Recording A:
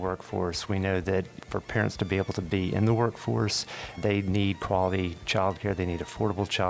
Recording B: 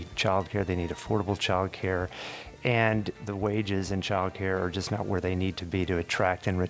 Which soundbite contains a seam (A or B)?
B